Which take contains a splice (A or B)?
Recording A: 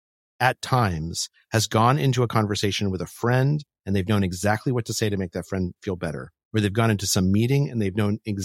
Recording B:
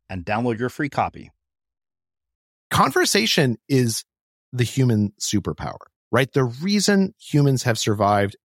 B